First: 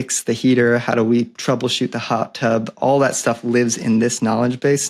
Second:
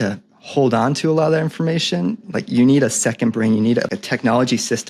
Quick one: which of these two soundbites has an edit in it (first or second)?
second